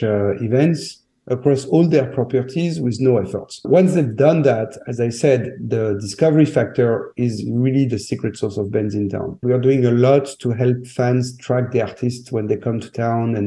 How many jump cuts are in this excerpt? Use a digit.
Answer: 2